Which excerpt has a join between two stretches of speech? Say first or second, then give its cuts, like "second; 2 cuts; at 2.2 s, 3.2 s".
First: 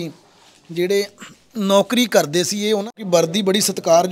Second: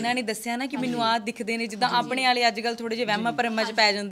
first; 1 cut; at 2.9 s